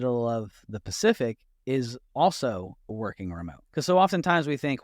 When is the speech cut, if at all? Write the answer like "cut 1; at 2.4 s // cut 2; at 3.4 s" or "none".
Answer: cut 1; at 3.1 s